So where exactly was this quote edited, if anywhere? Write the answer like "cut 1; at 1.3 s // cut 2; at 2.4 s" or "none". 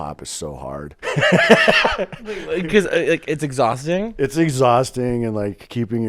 cut 1; at 0.9 s

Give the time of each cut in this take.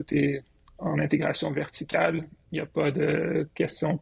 none

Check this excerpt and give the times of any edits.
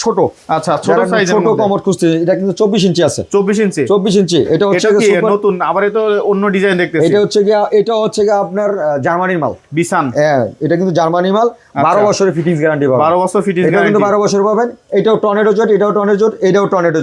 none

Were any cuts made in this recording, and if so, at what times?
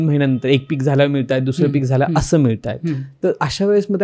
none

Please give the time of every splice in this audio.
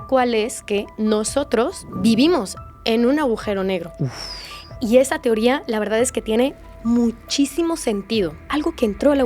cut 1; at 1.8 s // cut 2; at 8.4 s

